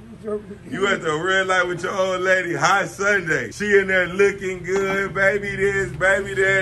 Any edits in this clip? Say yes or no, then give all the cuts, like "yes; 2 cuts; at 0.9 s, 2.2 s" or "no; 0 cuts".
yes; 1 cut; at 3.5 s